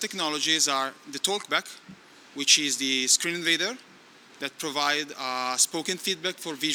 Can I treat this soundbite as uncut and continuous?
yes; 0 cuts

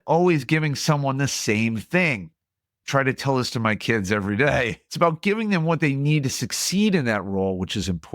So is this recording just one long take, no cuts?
no; 1 cut; at 4.8 s

